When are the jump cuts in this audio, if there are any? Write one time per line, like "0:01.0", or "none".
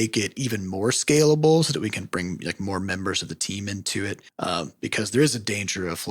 0:04.3